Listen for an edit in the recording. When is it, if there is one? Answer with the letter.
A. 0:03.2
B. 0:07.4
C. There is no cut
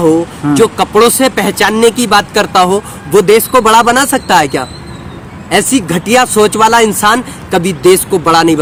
C